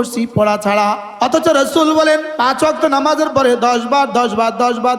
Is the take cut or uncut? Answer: cut